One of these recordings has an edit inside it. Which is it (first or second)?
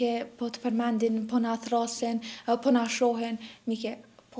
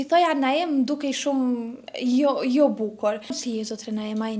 second